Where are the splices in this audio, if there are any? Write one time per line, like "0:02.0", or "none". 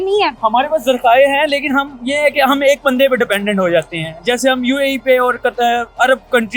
none